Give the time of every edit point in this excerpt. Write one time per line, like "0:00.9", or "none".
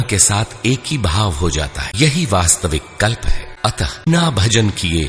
0:01.8
0:04.1